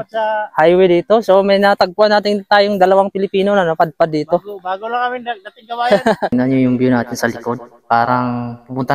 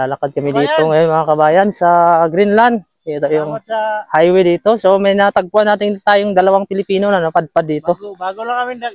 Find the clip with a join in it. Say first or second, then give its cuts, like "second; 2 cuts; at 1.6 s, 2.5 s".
first; 1 cut; at 6.3 s